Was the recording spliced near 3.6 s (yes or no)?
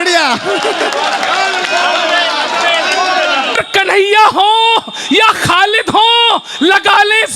yes